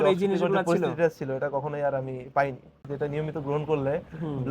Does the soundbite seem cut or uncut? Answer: cut